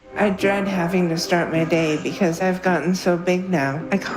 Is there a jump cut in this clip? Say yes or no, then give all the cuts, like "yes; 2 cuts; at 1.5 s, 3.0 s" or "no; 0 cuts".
no; 0 cuts